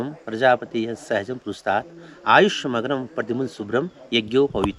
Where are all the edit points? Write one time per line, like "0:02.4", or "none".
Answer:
none